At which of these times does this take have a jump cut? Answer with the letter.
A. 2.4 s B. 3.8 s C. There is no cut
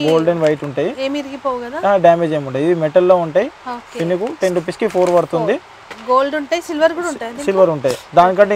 C